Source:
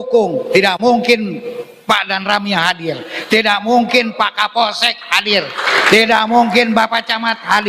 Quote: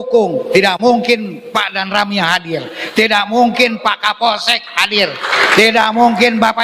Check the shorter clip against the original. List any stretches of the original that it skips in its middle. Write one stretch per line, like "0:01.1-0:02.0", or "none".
0:01.4-0:01.7